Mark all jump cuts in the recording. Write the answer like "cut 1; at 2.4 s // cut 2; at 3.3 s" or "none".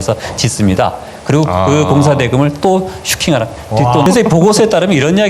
cut 1; at 4.1 s

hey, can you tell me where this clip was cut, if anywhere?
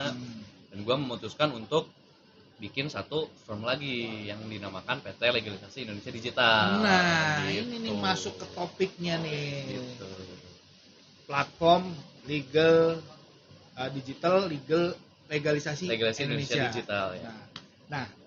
none

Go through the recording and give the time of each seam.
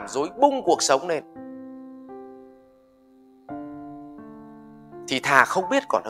cut 1; at 1.2 s // cut 2; at 3.1 s // cut 3; at 5.0 s

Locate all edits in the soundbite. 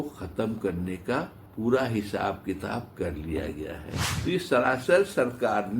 cut 1; at 1.4 s // cut 2; at 4.1 s

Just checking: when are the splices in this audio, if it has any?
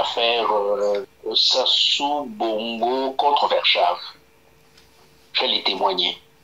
cut 1; at 1.1 s

